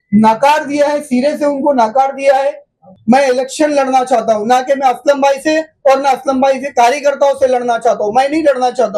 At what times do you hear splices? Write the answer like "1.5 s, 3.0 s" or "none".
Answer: 2.9 s